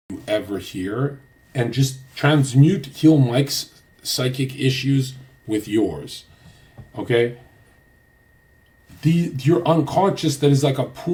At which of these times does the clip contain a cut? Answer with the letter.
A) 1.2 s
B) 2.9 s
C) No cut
C